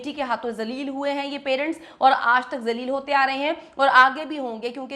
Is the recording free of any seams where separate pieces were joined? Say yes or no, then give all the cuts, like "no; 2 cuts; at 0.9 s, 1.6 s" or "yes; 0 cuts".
yes; 0 cuts